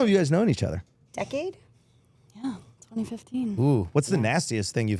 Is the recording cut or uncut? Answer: cut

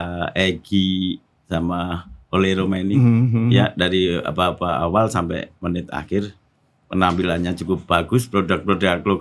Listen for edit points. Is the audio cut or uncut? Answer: uncut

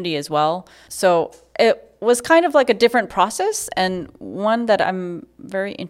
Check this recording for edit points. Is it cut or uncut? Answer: uncut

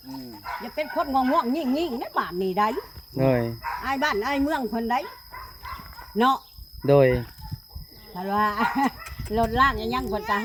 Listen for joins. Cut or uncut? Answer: uncut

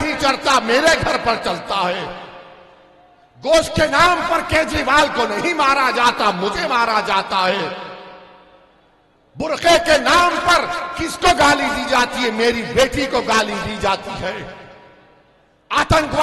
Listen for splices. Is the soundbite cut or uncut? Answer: uncut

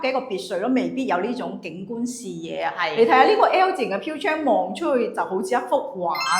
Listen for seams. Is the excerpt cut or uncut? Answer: uncut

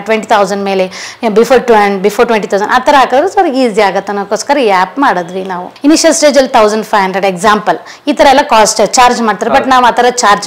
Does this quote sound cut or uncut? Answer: cut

